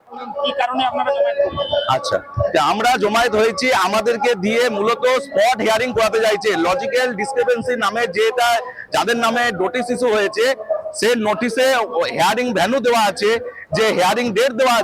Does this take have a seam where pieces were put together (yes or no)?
yes